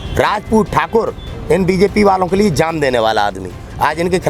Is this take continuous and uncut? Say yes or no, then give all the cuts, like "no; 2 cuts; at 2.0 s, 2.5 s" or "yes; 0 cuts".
yes; 0 cuts